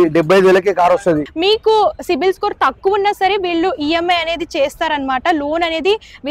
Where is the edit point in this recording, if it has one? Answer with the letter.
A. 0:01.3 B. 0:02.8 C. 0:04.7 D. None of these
A